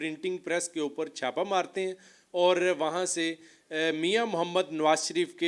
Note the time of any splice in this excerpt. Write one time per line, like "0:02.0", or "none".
none